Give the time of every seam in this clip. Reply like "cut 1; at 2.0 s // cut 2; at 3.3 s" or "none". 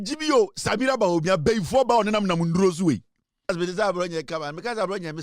cut 1; at 3.5 s